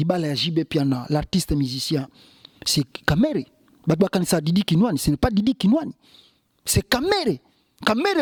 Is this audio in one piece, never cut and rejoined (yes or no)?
yes